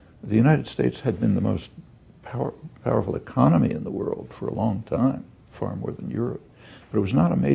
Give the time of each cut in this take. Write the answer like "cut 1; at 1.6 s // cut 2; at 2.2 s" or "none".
none